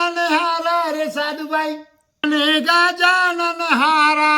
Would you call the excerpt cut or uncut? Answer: cut